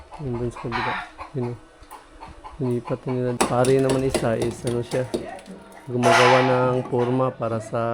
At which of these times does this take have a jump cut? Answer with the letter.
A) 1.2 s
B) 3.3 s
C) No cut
B